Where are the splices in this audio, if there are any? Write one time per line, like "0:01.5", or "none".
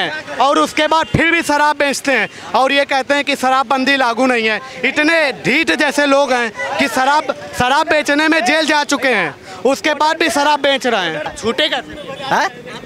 0:11.3